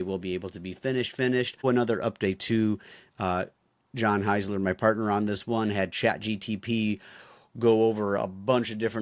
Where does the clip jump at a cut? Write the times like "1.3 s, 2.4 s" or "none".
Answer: 1.6 s